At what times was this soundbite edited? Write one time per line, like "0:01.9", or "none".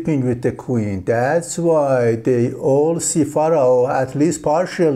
none